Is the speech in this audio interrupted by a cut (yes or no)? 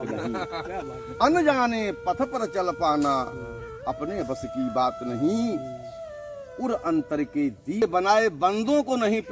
yes